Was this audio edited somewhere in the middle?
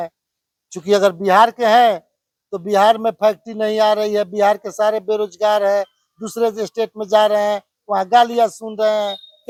no; 0 cuts

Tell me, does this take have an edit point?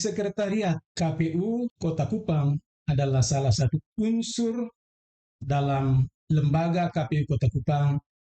yes; 2 cuts; at 0.9 s, 1.8 s

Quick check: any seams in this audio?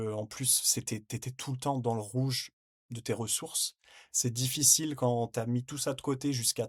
no; 0 cuts

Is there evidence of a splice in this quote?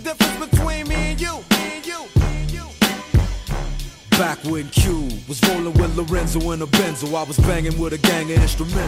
no; 0 cuts

